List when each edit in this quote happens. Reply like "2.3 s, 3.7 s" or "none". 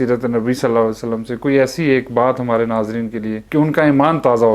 3.4 s